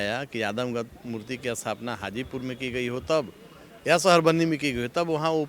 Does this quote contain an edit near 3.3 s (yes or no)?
no